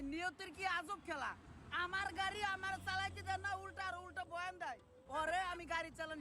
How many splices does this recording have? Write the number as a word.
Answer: one